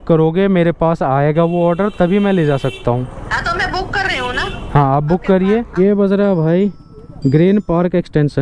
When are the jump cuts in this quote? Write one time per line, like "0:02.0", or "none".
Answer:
0:05.7